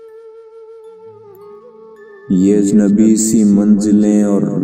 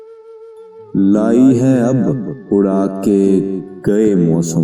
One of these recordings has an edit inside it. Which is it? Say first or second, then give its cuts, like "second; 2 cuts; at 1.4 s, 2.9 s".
first; 1 cut; at 1.2 s